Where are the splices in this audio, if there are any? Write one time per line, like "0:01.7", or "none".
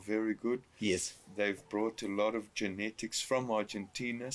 0:01.2